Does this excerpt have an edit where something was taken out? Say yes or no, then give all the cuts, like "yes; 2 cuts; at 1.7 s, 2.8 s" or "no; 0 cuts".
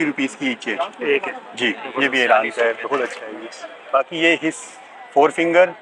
no; 0 cuts